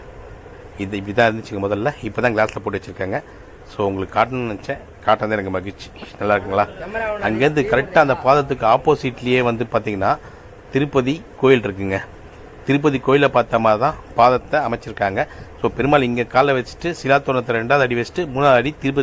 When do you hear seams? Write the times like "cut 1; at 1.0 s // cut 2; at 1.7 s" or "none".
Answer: none